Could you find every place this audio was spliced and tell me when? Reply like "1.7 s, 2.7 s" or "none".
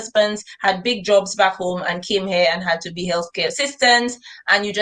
none